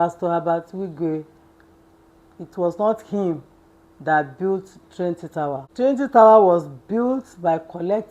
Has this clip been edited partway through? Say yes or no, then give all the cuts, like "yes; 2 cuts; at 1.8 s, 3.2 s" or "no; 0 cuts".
yes; 1 cut; at 5.7 s